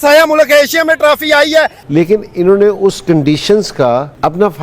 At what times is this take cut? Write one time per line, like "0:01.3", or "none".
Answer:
0:01.8